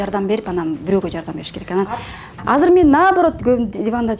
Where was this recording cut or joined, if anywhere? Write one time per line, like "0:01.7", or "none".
0:02.3